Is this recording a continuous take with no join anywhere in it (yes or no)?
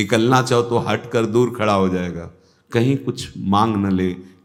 yes